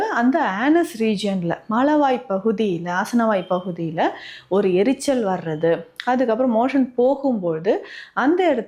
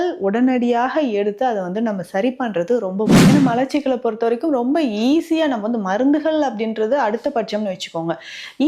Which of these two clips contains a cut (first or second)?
second